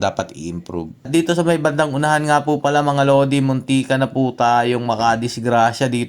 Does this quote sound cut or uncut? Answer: cut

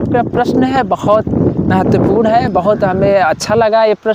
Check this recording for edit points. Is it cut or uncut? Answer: uncut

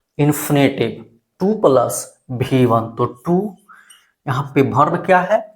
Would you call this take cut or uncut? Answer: uncut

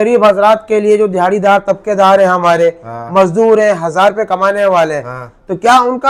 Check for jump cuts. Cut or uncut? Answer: uncut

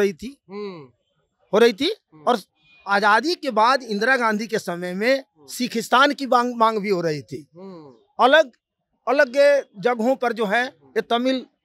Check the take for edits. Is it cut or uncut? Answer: uncut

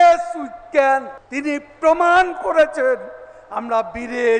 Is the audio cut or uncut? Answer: cut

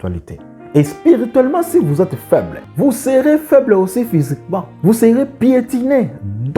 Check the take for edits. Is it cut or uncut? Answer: cut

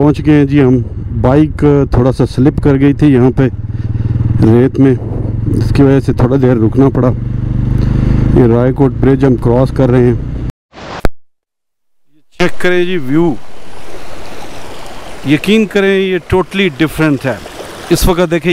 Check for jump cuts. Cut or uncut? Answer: cut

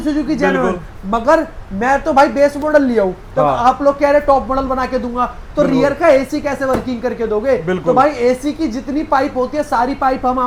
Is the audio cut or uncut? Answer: uncut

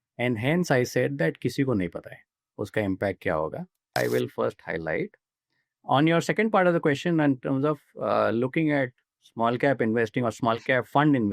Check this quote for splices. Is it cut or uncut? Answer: cut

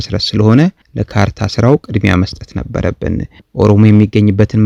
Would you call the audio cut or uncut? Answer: uncut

